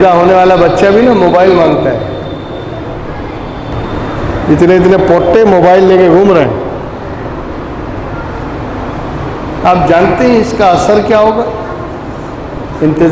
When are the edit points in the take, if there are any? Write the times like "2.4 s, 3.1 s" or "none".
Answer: 3.7 s